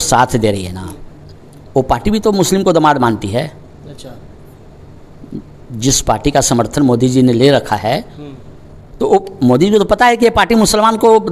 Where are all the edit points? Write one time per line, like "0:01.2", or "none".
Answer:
none